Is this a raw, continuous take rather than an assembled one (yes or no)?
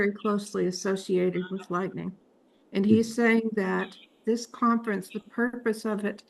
yes